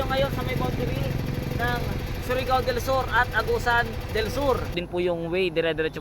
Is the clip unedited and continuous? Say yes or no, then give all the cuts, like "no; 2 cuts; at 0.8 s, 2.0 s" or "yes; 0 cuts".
no; 1 cut; at 4.8 s